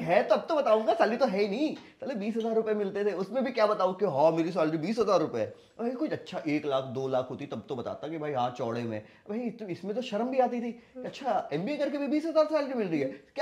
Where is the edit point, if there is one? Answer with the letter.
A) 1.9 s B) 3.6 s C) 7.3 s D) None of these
D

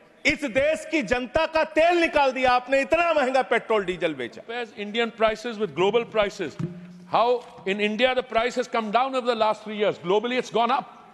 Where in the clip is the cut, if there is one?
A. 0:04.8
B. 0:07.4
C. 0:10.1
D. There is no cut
A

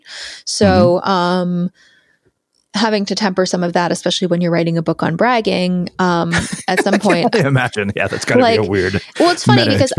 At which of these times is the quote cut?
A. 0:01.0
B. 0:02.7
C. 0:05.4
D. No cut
D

